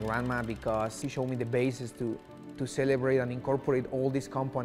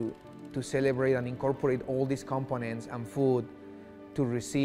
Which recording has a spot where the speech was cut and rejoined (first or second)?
first